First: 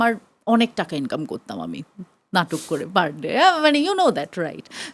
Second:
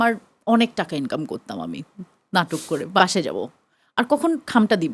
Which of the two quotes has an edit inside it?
second; 1 cut; at 3.0 s

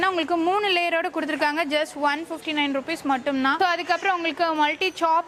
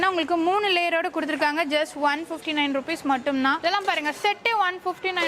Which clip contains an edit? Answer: second; 1 cut; at 3.6 s

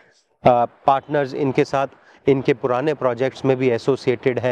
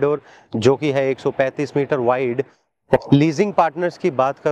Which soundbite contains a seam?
second; 1 cut; at 3.0 s

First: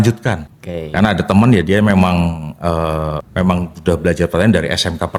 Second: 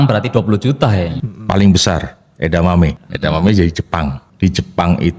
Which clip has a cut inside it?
second; 3 cuts; at 1.2 s, 3.0 s, 4.2 s

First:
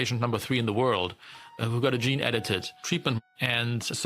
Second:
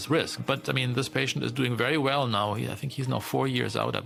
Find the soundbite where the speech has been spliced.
first; 2 cuts; at 1.6 s, 2.9 s

